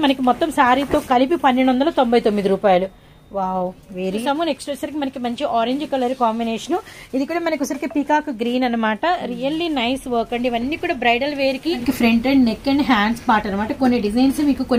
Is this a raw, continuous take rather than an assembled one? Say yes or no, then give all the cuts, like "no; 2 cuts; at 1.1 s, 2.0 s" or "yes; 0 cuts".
no; 2 cuts; at 4.2 s, 11.8 s